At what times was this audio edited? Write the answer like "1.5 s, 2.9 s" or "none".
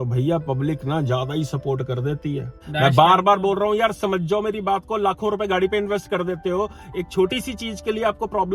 2.6 s